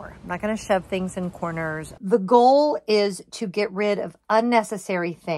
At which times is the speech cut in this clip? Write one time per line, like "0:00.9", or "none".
0:01.9